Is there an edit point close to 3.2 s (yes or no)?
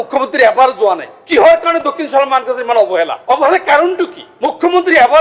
yes